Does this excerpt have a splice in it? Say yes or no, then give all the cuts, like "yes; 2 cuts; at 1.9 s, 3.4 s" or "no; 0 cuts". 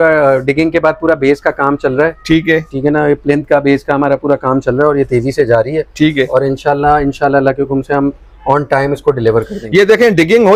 no; 0 cuts